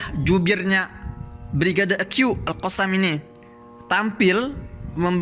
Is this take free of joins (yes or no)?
yes